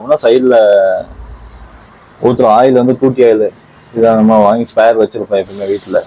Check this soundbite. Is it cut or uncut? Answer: uncut